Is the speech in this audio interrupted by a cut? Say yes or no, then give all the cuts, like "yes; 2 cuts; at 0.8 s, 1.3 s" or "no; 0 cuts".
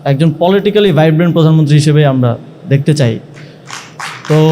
no; 0 cuts